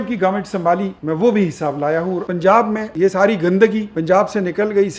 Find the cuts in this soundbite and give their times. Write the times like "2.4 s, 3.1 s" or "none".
0.9 s, 2.3 s, 2.9 s, 3.9 s